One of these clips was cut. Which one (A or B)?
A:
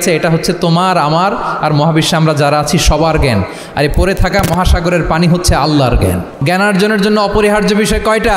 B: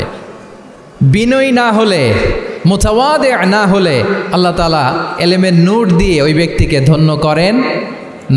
A